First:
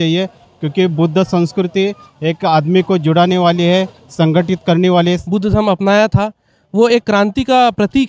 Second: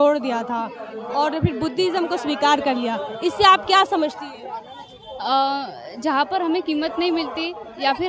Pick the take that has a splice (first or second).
first